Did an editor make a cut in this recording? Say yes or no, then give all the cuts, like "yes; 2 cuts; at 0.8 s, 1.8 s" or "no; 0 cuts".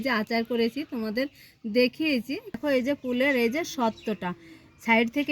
yes; 1 cut; at 2.6 s